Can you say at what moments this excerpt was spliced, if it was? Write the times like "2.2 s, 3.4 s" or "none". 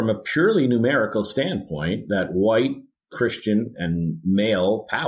none